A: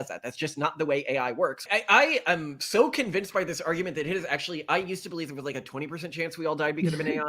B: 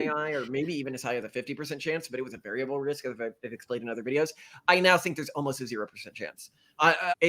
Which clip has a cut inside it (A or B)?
A